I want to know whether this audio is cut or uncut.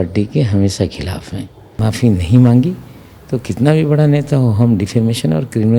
cut